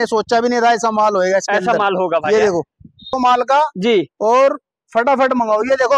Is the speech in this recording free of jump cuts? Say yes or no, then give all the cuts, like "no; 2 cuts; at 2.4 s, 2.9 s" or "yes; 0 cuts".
no; 1 cut; at 3.2 s